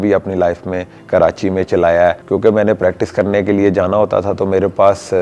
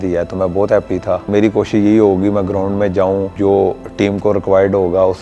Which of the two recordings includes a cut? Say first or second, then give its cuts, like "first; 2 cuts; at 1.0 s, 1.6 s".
second; 1 cut; at 3.3 s